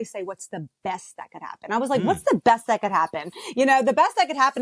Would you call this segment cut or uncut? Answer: uncut